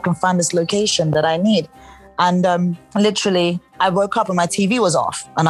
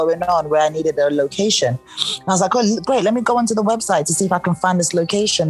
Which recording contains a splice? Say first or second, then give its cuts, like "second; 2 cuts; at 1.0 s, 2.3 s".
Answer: first; 2 cuts; at 2.8 s, 3.7 s